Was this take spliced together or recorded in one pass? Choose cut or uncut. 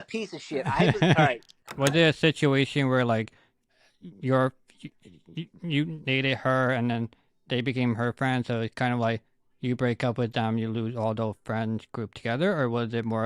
cut